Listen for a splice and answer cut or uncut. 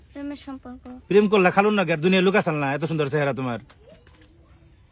uncut